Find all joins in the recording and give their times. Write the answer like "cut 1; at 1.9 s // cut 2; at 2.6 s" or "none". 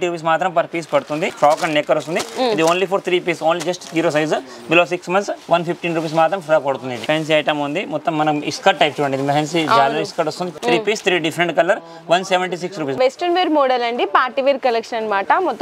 cut 1; at 1.3 s // cut 2; at 7.0 s // cut 3; at 10.5 s // cut 4; at 13.0 s